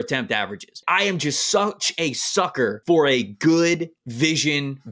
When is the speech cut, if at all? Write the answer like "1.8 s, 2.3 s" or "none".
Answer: 0.8 s, 2.8 s, 4.0 s